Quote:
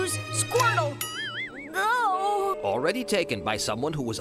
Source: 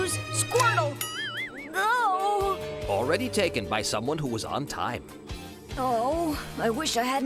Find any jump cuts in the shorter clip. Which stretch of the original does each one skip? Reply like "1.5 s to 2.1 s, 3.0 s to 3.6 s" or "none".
2.6 s to 2.8 s

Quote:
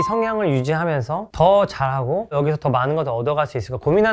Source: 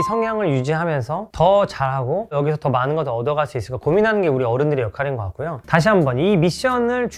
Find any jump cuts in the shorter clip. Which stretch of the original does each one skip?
none

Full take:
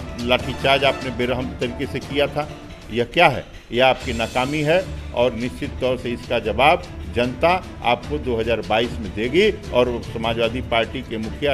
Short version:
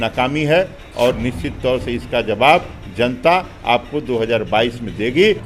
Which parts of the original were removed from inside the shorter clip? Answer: none

